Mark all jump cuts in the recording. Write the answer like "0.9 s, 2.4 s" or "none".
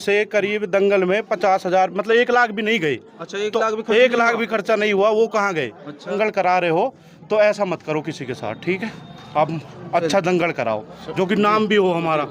6.1 s